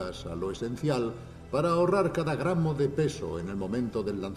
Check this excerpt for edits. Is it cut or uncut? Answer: uncut